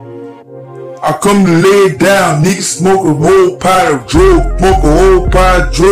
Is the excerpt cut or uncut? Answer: uncut